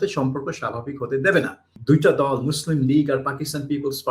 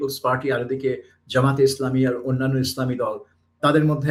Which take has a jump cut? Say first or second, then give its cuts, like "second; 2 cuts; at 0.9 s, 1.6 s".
first; 1 cut; at 1.7 s